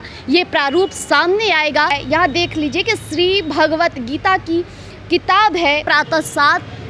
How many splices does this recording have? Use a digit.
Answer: 2